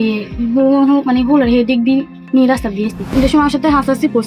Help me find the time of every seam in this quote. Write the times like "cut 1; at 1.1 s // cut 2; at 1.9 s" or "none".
cut 1; at 3.1 s

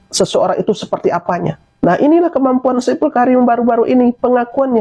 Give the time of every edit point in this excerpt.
cut 1; at 1.6 s

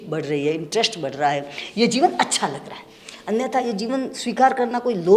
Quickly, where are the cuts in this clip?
none

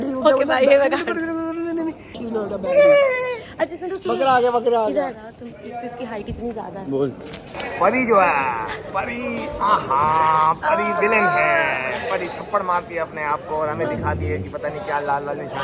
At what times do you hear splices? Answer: cut 1; at 2.2 s // cut 2; at 3.5 s // cut 3; at 5.2 s // cut 4; at 7.5 s

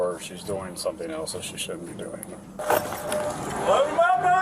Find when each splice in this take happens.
cut 1; at 2.6 s

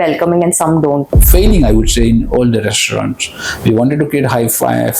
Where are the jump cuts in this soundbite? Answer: cut 1; at 1.2 s

